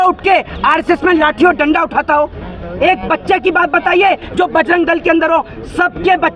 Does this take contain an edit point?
no; 0 cuts

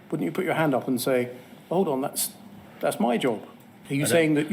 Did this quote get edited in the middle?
yes; 1 cut; at 3.5 s

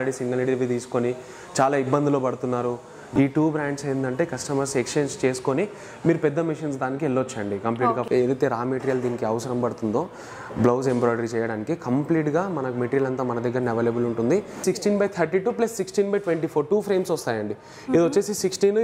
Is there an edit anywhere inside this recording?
yes; 3 cuts; at 3.2 s, 8.0 s, 14.6 s

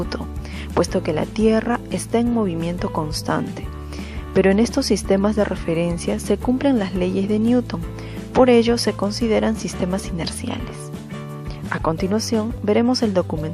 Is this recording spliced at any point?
no; 0 cuts

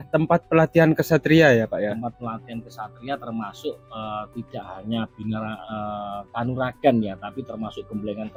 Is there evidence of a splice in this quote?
no; 0 cuts

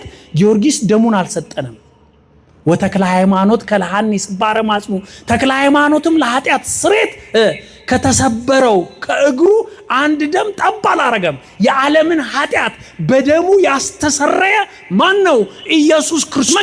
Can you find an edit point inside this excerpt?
no; 0 cuts

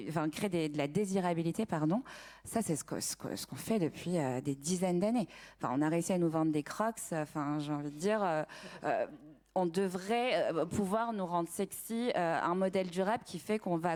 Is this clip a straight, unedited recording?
yes; 0 cuts

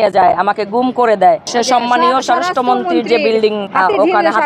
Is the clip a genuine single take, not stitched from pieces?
no; 2 cuts; at 1.5 s, 3.6 s

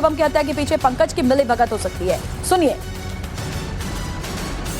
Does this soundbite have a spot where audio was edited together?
yes; 1 cut; at 2.3 s

